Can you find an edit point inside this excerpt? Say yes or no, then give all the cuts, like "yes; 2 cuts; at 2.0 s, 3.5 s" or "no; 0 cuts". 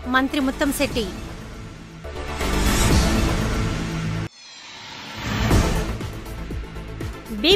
no; 0 cuts